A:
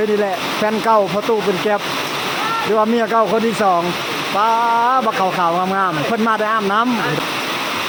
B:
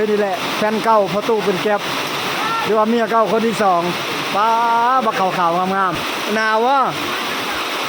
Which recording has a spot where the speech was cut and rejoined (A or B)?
B